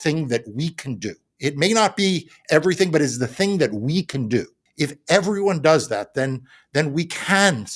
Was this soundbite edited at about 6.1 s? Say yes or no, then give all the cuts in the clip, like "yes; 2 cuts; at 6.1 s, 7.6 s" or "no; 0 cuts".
no; 1 cut; at 4.6 s